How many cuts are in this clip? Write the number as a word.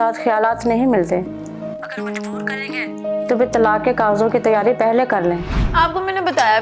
one